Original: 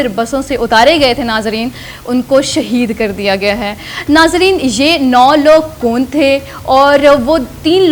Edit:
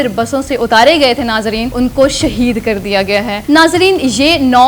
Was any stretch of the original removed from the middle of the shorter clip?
yes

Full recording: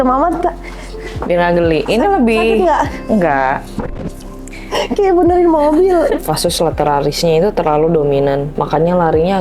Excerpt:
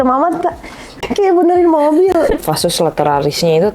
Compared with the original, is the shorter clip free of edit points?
no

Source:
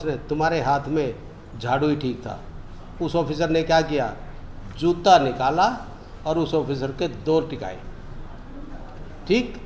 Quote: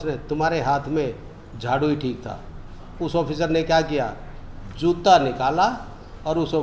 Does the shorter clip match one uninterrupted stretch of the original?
yes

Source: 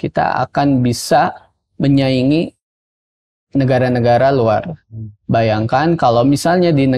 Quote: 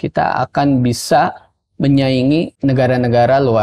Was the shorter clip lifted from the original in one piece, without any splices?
no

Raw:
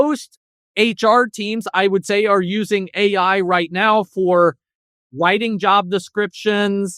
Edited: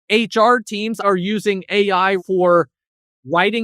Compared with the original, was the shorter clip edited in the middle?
yes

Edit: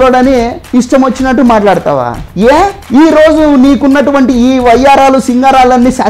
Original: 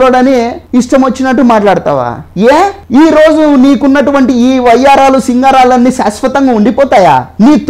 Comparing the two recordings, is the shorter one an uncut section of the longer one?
yes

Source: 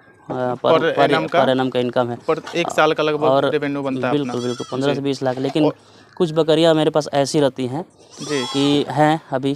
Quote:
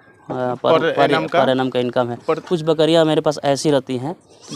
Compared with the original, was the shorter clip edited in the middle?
yes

